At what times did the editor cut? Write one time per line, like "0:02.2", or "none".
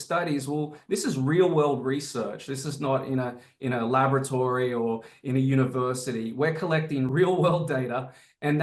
0:07.1